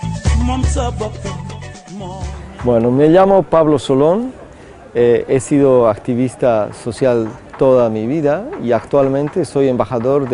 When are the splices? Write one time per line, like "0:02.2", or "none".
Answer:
0:01.3